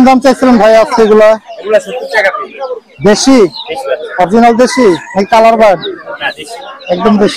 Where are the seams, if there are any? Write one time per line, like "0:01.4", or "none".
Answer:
none

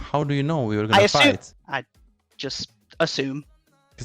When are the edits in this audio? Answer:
0:01.5

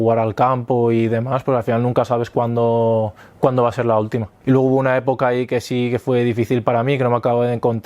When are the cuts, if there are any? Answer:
0:04.3

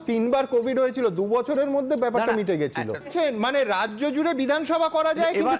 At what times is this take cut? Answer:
0:03.1

